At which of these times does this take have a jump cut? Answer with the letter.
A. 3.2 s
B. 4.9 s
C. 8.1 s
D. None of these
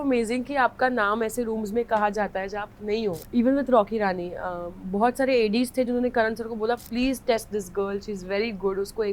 A